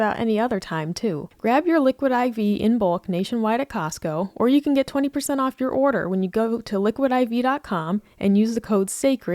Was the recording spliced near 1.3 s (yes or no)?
yes